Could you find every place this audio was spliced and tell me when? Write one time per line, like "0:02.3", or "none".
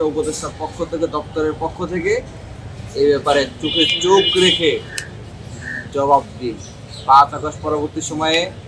none